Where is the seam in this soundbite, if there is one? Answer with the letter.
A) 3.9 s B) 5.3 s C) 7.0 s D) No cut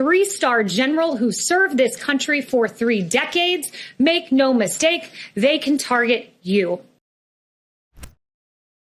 D